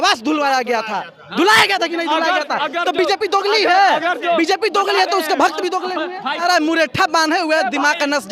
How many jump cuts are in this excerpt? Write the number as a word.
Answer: one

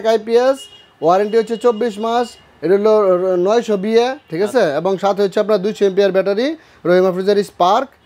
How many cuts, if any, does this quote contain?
zero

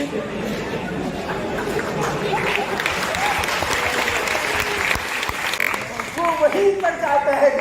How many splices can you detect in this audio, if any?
one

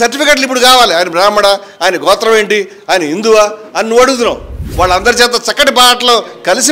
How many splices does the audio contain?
one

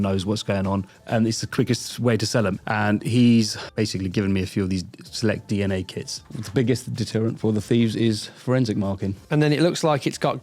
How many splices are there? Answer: five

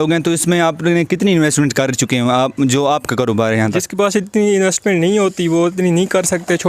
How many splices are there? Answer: one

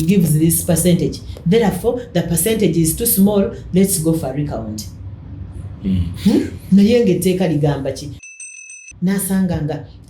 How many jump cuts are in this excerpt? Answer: one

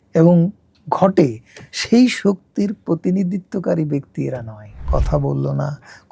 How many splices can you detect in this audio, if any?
one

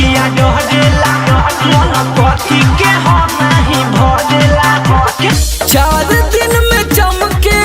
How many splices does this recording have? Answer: one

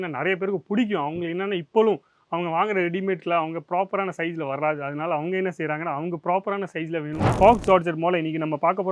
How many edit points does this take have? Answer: one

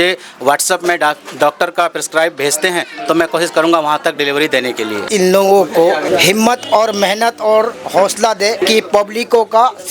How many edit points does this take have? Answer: three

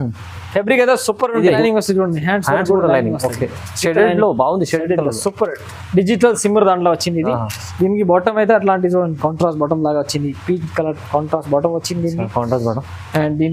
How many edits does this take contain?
one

